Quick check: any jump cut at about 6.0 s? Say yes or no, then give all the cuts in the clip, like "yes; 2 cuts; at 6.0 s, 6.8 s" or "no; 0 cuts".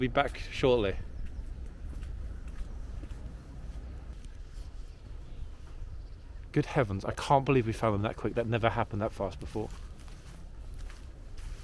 no; 1 cut; at 4.1 s